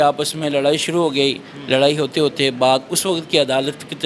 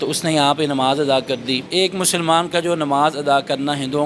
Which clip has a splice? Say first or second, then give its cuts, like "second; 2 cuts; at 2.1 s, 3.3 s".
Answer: second; 1 cut; at 1.6 s